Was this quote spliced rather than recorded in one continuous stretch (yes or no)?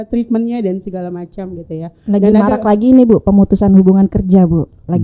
no